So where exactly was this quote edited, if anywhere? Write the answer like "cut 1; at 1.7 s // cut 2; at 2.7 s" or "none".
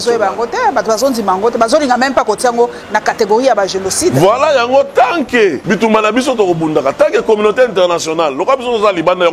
cut 1; at 5.6 s